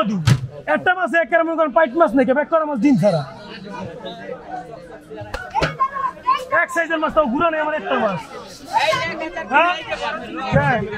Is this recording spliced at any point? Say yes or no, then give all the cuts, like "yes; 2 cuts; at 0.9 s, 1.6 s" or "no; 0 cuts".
no; 0 cuts